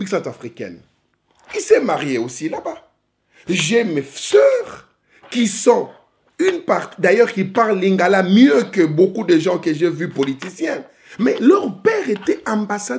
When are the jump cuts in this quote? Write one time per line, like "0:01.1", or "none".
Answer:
none